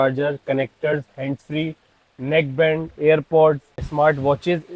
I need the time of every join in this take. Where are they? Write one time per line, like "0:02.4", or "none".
none